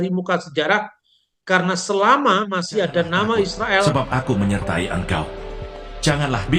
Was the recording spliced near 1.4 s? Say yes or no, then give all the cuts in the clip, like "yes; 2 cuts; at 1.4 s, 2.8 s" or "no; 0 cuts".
no; 1 cut; at 3.9 s